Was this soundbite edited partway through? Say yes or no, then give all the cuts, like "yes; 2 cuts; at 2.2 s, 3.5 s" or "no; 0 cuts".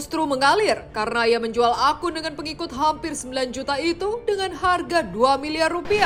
no; 0 cuts